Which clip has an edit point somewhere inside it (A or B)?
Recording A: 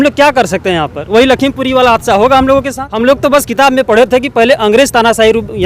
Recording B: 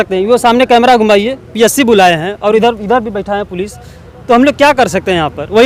A